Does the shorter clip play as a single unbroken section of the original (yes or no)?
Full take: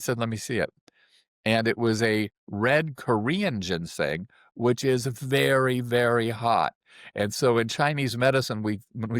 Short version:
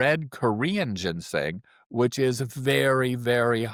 yes